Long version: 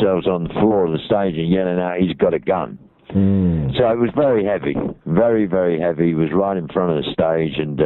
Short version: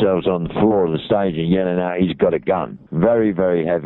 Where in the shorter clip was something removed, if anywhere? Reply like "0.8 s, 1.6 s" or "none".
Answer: 2.8 s